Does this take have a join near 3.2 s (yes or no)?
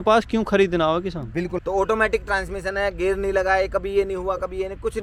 no